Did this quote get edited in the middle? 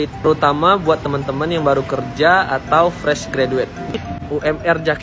yes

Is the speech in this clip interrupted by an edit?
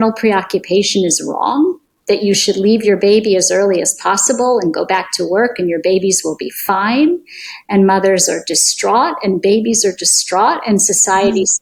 no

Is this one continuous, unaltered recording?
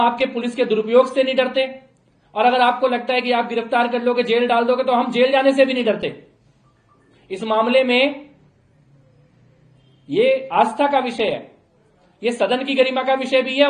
yes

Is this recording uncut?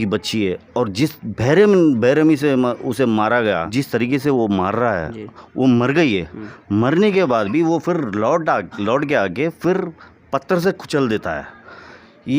no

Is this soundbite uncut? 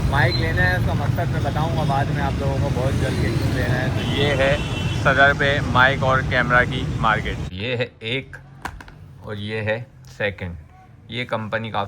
no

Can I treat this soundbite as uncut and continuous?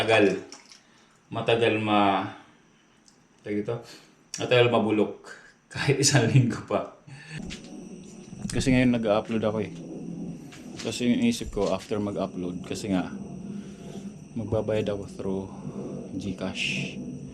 no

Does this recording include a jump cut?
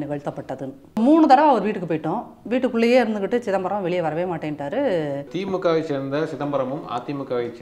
yes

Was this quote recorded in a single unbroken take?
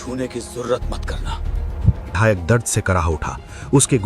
no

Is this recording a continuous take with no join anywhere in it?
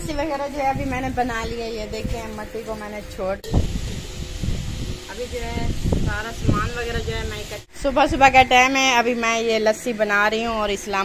no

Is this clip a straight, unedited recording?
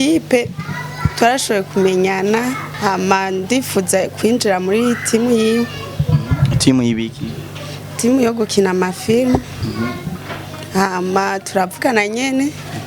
no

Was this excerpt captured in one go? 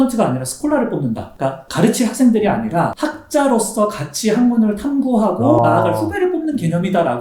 yes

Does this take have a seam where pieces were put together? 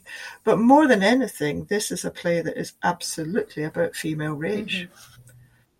no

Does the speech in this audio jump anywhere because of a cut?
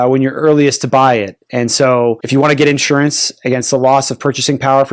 yes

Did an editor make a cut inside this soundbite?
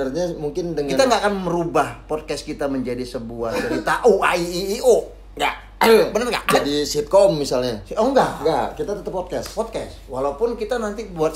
no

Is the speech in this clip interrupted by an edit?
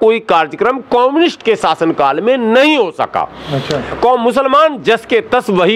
no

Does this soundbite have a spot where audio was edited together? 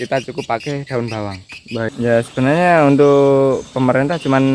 yes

